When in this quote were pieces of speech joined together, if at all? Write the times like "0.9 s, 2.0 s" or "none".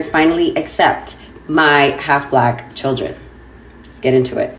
none